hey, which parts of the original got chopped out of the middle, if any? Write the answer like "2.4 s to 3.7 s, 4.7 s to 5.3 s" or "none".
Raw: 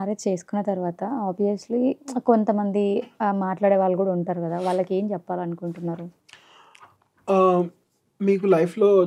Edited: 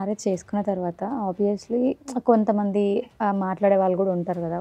none